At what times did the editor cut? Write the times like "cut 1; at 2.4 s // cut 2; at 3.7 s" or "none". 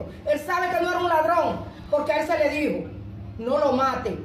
none